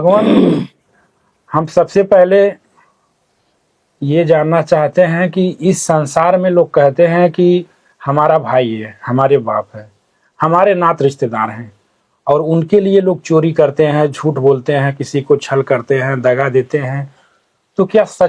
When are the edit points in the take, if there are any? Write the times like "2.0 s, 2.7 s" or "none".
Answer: none

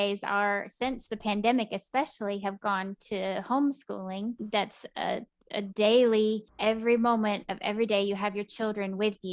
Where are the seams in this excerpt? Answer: 4.4 s, 6.5 s

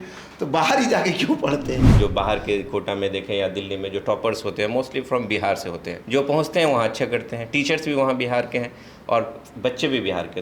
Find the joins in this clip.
1.9 s

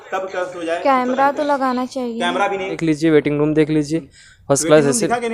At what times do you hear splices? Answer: 2.7 s

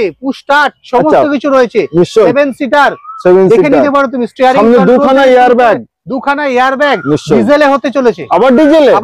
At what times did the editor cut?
none

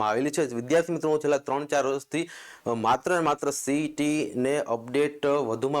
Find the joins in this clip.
none

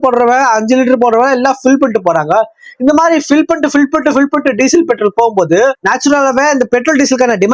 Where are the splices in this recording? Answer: none

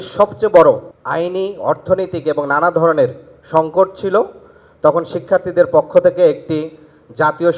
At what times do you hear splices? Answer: 0.9 s

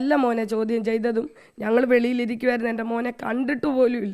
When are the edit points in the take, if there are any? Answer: none

